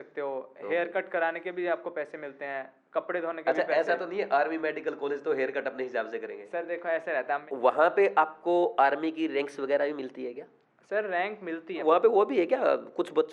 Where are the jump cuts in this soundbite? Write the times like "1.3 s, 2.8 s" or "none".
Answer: 7.4 s, 11.8 s